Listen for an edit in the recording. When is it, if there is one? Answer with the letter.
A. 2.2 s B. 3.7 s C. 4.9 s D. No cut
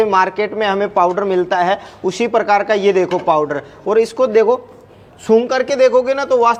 D